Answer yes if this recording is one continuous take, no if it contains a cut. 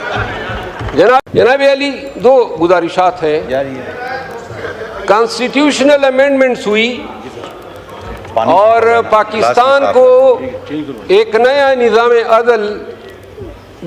no